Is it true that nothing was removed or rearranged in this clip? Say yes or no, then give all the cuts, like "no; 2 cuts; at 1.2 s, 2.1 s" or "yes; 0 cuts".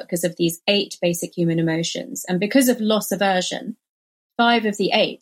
yes; 0 cuts